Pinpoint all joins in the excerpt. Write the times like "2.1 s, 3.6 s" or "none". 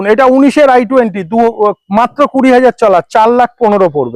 none